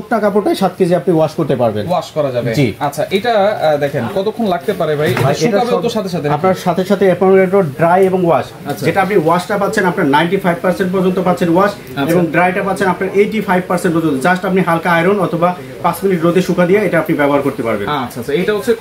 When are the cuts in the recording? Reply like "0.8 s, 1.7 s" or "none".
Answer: none